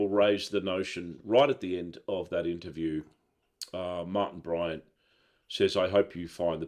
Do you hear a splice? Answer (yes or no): no